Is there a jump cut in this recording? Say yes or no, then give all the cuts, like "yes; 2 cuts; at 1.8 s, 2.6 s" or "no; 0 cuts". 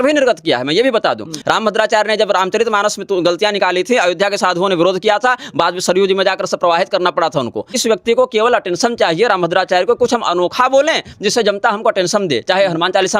yes; 2 cuts; at 1.3 s, 7.8 s